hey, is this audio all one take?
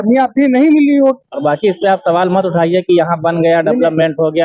no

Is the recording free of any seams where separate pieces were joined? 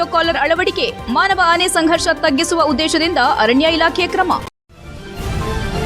no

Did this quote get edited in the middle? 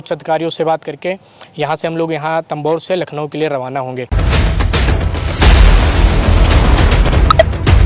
yes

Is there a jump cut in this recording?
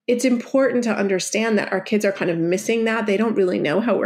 no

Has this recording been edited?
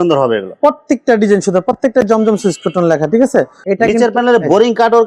yes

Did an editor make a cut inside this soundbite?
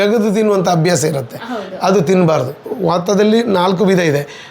yes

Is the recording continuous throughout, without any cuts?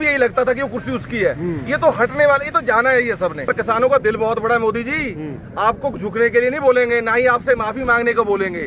no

